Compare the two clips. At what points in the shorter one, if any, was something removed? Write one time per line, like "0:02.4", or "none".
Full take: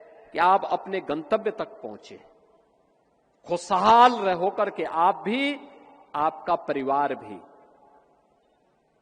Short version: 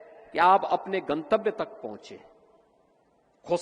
none

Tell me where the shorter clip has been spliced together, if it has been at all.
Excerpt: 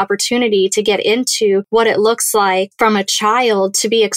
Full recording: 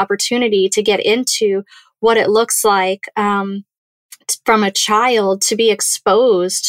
0:01.7
0:02.7

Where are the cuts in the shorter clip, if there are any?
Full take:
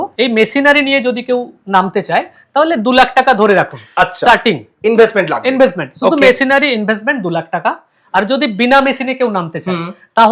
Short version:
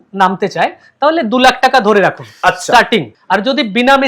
0:03.1

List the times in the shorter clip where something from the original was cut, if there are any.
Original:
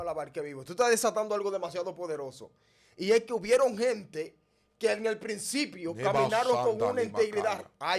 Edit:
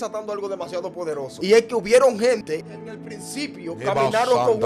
0:01.3
0:03.1

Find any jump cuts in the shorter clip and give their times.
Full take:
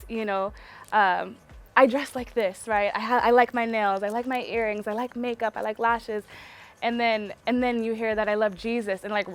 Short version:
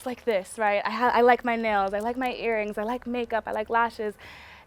none

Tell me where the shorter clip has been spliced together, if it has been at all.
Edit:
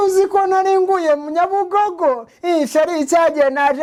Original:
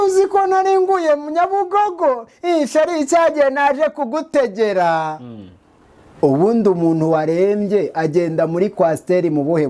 none

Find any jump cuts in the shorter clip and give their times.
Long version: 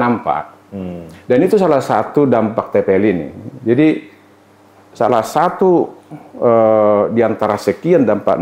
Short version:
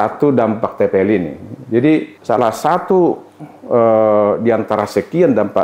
0:02.1

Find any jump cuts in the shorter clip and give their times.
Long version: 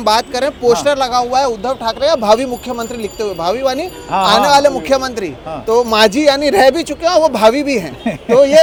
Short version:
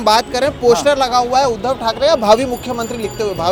none

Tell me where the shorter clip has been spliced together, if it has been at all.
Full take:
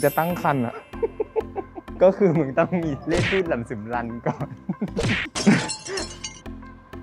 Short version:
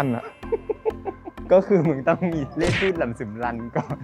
none

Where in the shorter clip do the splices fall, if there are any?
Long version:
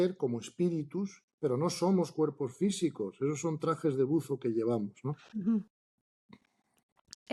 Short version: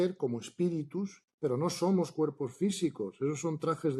none

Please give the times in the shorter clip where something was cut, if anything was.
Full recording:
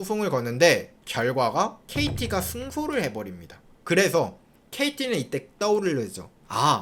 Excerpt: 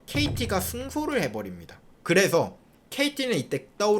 none

